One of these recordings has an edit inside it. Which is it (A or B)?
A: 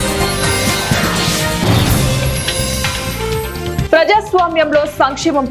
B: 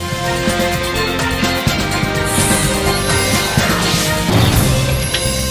A